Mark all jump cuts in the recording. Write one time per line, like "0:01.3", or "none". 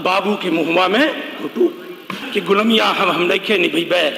0:02.2